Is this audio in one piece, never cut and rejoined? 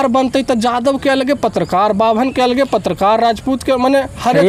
yes; 0 cuts

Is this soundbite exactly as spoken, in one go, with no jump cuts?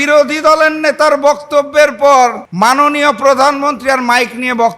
no; 1 cut; at 2.4 s

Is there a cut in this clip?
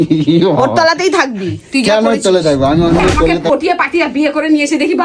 yes; 1 cut; at 3.5 s

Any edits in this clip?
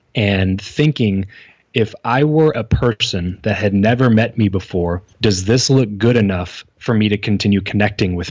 yes; 1 cut; at 5.0 s

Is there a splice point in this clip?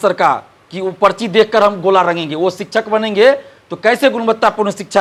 no; 0 cuts

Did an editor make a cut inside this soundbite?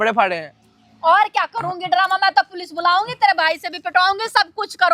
no; 0 cuts

